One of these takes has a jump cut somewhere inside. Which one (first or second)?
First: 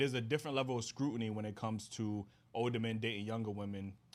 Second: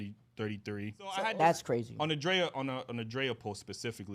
second